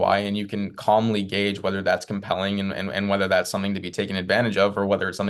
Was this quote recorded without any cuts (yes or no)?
yes